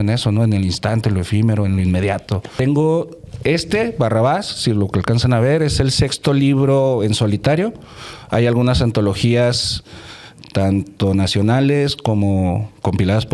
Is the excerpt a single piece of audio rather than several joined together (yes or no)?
no